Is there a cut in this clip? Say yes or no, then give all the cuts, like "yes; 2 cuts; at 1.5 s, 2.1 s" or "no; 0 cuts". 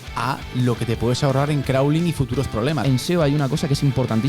yes; 1 cut; at 2.8 s